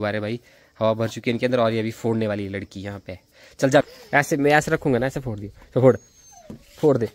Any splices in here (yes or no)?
yes